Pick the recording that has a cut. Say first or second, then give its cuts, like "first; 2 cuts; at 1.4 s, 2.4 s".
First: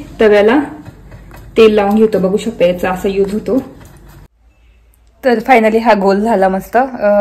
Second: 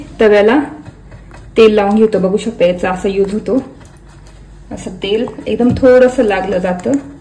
first; 1 cut; at 4.3 s